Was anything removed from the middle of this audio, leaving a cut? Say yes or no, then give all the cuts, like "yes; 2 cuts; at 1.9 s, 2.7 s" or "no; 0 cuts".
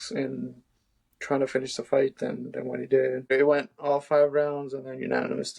yes; 1 cut; at 3.3 s